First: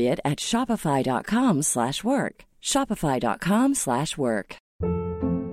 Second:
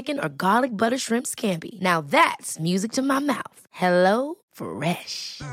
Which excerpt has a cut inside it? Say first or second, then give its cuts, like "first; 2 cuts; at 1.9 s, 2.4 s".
first; 1 cut; at 4.6 s